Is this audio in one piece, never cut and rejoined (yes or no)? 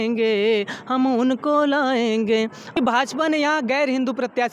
no